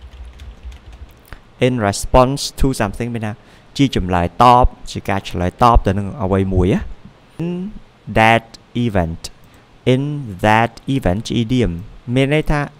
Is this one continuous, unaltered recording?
no; 1 cut; at 7.4 s

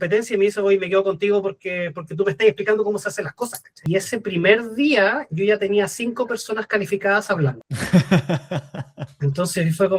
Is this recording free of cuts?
no; 2 cuts; at 3.7 s, 7.7 s

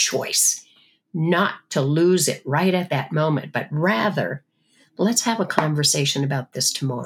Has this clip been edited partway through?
no; 0 cuts

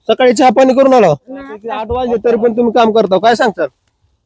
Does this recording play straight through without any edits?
no; 1 cut; at 1.8 s

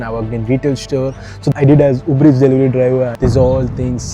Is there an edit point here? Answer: yes; 2 cuts; at 1.5 s, 3.1 s

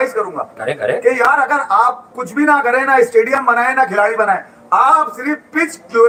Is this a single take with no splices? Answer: yes; 0 cuts

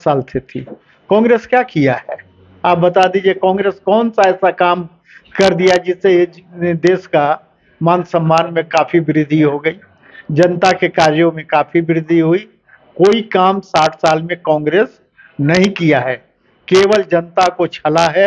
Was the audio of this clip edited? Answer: no; 0 cuts

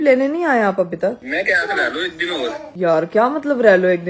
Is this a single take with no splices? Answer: yes; 0 cuts

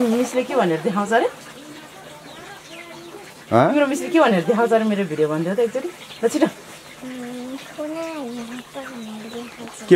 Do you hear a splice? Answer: no; 0 cuts

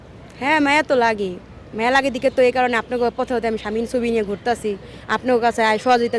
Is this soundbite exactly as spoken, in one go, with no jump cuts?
yes; 0 cuts

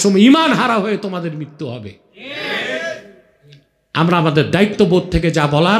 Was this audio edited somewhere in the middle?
no; 0 cuts

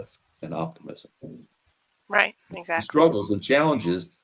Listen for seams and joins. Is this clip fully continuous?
yes; 0 cuts

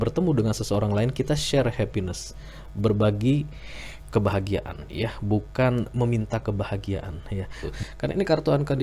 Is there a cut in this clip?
yes; 1 cut; at 7.6 s

